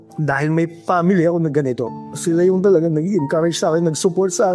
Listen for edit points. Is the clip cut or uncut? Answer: uncut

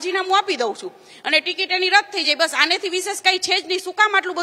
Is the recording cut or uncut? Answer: uncut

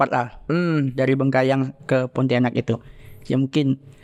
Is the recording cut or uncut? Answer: uncut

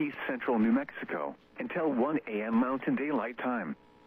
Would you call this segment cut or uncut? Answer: uncut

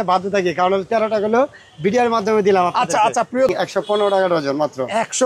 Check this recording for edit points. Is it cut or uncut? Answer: cut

